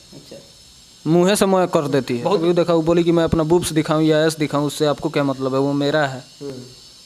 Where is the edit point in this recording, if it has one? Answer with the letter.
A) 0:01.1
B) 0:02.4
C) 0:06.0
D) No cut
B